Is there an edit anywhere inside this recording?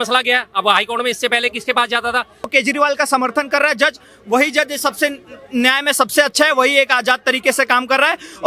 yes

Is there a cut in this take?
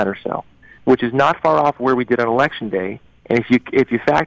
no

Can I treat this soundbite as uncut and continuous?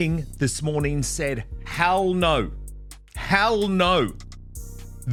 yes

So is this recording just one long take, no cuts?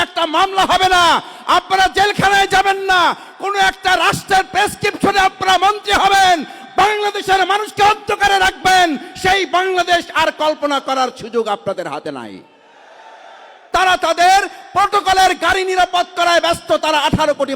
no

